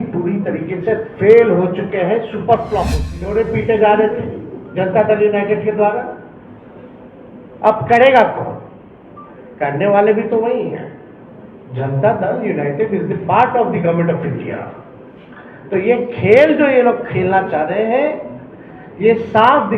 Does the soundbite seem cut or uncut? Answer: cut